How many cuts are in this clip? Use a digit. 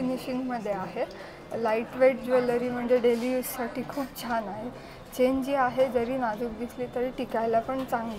0